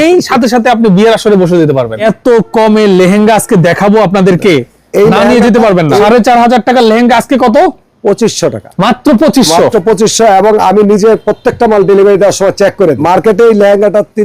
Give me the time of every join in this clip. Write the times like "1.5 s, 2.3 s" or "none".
2.0 s, 6.0 s, 8.7 s, 13.0 s